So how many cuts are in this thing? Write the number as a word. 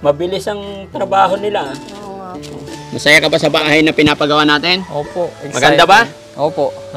two